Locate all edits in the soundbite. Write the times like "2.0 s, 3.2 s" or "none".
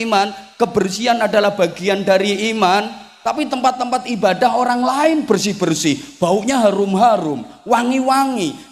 none